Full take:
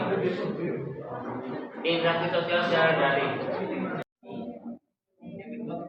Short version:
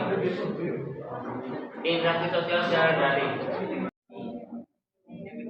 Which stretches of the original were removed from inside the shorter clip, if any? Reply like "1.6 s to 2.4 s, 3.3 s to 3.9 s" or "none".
3.9 s to 4.0 s